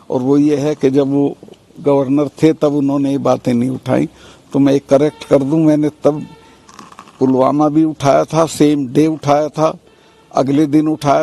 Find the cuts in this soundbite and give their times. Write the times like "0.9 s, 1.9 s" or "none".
none